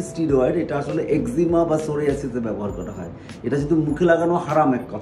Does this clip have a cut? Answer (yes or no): no